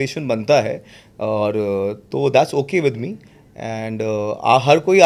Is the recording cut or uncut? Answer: uncut